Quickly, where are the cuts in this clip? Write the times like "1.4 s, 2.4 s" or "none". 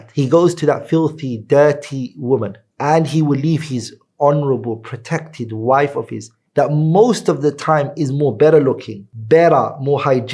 none